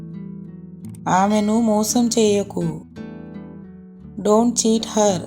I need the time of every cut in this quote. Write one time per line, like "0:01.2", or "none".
0:01.0
0:02.8
0:04.1